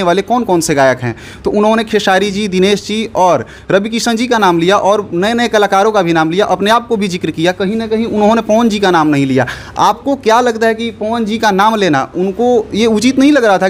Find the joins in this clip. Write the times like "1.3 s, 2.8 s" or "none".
none